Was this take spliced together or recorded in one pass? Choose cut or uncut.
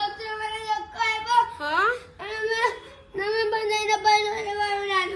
uncut